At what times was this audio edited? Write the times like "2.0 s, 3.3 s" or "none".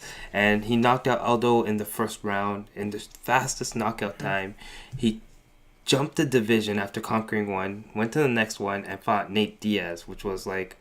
4.5 s

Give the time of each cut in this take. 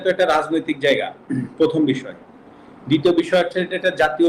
none

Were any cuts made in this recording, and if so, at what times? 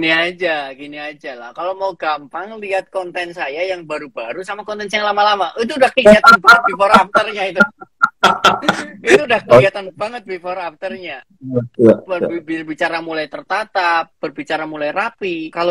none

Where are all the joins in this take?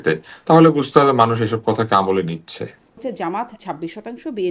3.0 s

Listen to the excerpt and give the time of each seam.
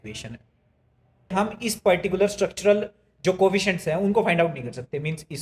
1.3 s

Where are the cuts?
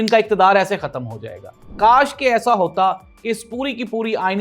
1.7 s

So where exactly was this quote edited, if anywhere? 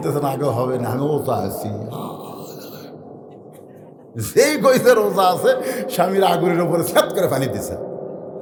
none

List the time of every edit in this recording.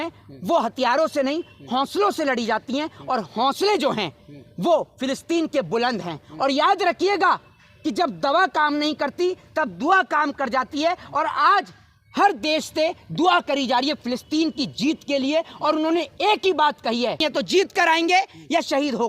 17.2 s

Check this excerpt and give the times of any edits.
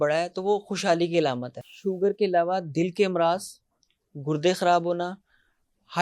1.5 s

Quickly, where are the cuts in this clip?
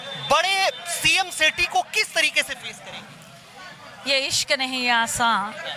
none

